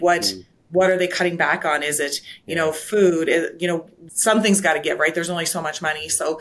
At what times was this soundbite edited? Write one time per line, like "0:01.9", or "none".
0:04.1